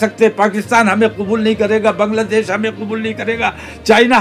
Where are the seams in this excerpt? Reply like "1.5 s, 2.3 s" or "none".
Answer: none